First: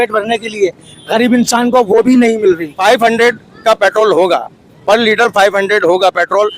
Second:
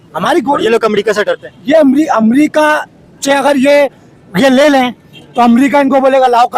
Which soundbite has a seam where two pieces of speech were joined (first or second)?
first